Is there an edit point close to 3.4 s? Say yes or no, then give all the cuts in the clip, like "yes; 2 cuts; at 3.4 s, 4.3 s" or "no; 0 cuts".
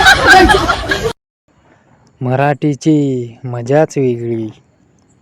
no; 1 cut; at 1.3 s